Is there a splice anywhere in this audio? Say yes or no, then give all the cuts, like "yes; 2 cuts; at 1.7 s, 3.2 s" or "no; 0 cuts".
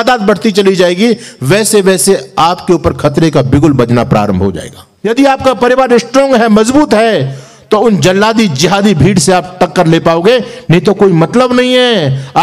yes; 1 cut; at 4.9 s